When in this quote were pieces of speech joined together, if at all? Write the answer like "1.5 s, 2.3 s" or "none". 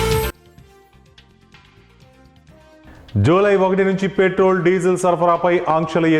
2.9 s